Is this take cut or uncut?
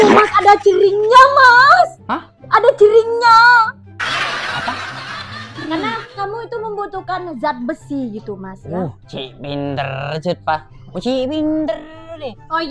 cut